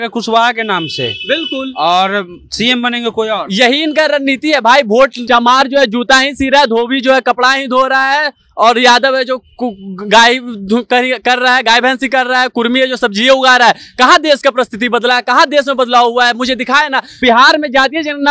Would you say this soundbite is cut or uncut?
cut